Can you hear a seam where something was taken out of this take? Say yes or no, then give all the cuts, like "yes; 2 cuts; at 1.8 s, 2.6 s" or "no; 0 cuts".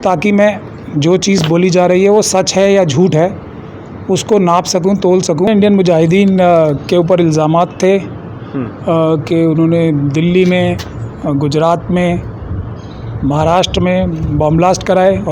yes; 1 cut; at 5.5 s